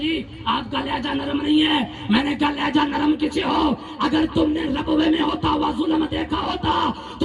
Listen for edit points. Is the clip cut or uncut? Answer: uncut